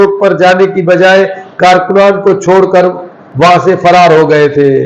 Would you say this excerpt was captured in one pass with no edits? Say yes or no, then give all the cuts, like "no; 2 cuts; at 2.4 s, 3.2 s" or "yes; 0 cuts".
yes; 0 cuts